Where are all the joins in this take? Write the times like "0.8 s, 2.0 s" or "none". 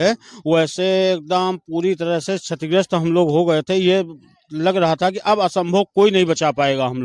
none